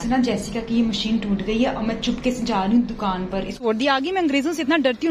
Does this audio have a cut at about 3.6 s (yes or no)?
yes